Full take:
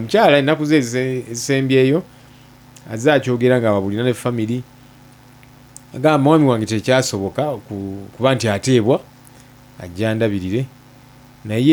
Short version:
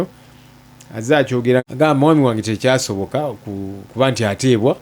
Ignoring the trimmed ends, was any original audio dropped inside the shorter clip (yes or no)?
yes